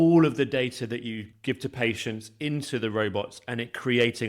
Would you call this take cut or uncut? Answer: cut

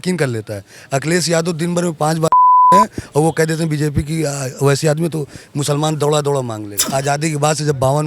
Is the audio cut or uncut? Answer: cut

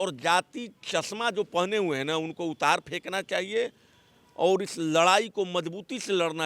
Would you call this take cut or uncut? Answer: uncut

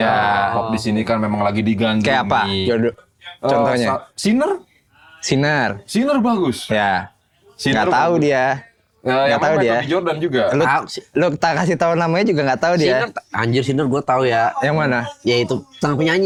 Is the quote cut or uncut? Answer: uncut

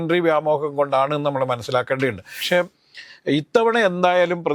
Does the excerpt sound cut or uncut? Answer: cut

